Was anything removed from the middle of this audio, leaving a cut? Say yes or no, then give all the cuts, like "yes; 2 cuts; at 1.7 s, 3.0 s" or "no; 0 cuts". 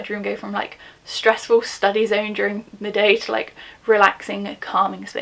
no; 0 cuts